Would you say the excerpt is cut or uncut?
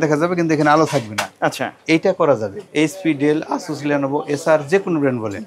cut